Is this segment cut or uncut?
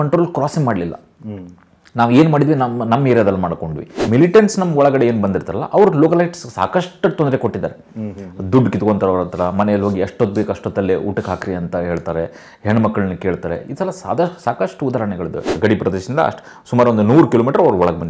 cut